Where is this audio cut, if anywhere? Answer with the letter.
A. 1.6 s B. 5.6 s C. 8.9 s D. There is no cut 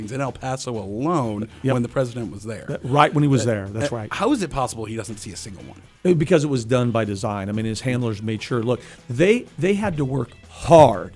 C